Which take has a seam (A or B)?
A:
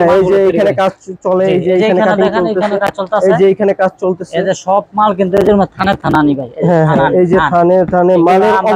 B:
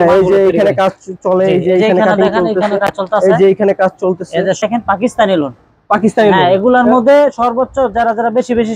B